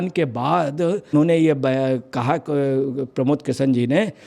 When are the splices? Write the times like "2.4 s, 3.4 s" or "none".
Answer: 1.1 s